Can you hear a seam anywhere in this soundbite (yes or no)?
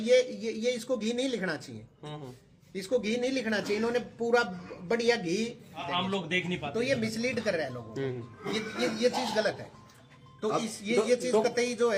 no